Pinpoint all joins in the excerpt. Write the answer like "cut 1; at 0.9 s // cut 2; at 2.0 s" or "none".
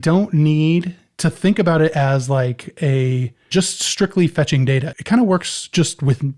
cut 1; at 1.0 s // cut 2; at 4.9 s